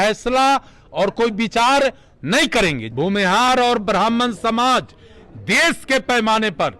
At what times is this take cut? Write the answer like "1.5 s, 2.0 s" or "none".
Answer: 2.8 s